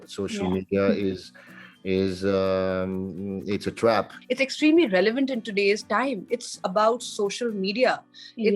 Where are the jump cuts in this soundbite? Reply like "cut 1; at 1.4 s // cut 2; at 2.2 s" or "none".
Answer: cut 1; at 4.2 s